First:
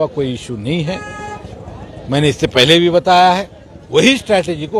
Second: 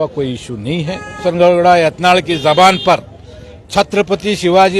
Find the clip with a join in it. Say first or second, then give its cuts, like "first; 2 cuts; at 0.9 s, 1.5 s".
second; 1 cut; at 1.2 s